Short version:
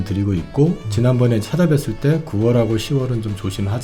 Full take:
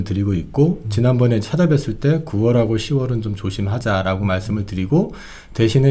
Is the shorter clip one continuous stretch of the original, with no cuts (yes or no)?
yes